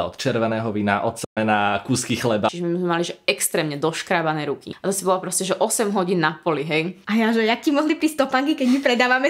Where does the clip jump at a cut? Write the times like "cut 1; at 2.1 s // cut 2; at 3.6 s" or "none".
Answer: cut 1; at 2.5 s // cut 2; at 4.7 s // cut 3; at 7.0 s

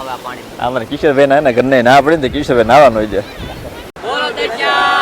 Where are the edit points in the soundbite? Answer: cut 1; at 3.9 s

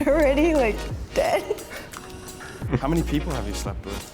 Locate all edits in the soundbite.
cut 1; at 2.7 s

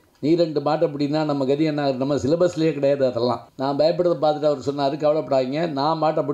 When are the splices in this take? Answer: cut 1; at 3.5 s

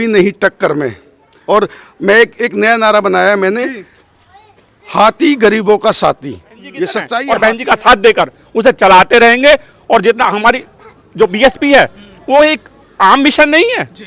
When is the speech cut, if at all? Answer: cut 1; at 7.1 s

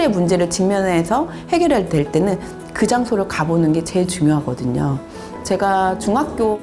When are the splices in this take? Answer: cut 1; at 5.3 s

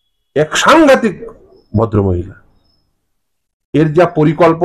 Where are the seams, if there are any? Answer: none

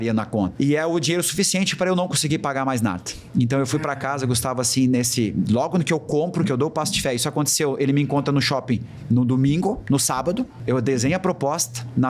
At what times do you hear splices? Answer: cut 1; at 10.6 s

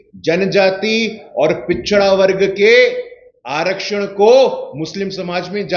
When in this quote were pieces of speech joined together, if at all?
none

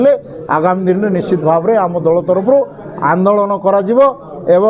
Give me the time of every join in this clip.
none

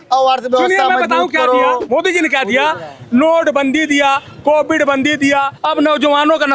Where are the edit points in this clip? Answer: cut 1; at 1.8 s // cut 2; at 5.6 s

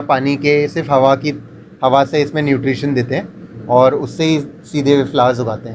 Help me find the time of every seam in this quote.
none

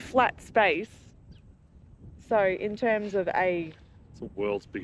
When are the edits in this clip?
none

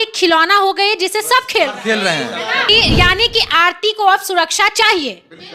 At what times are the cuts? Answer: cut 1; at 2.7 s

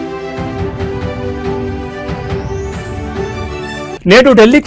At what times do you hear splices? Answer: none

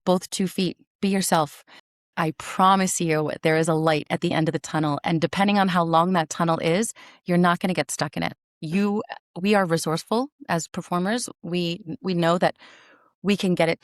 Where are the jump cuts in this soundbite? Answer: cut 1; at 2.0 s

